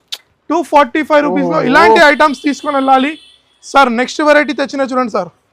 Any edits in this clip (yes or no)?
no